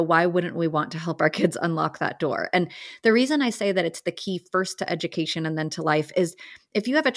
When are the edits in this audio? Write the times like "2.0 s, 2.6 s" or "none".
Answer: none